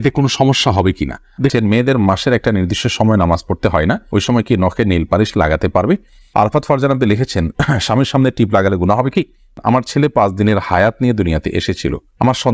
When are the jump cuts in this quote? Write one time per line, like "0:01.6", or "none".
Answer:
0:01.5
0:06.3
0:09.5